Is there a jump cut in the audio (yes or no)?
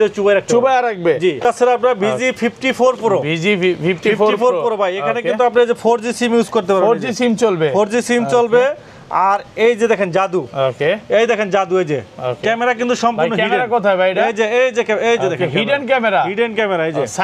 yes